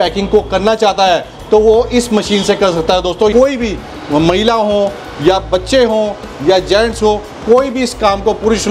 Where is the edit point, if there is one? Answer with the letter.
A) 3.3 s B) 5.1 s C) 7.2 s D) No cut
A